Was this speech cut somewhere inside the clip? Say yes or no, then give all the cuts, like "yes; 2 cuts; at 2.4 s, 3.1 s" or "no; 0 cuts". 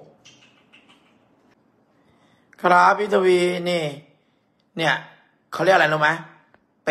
yes; 1 cut; at 1.5 s